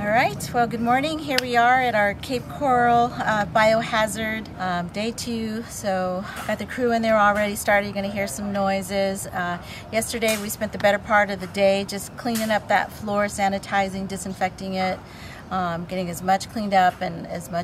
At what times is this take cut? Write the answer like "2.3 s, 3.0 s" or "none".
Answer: none